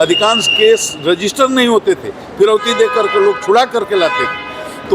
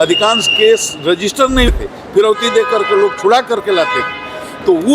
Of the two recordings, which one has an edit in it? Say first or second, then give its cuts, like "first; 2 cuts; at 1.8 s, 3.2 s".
second; 1 cut; at 1.7 s